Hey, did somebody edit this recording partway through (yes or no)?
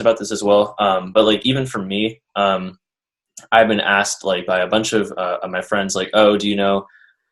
no